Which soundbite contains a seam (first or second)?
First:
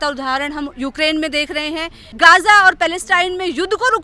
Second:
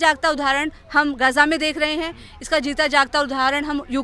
first